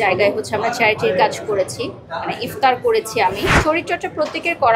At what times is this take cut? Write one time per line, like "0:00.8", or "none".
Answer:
0:03.6